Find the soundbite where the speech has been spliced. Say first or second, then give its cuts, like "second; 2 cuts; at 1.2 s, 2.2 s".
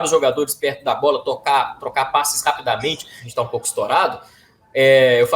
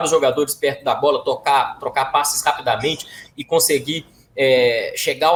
first; 1 cut; at 3.2 s